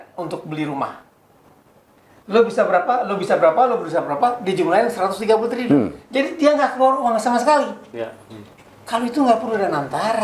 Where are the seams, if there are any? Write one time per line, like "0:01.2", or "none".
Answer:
none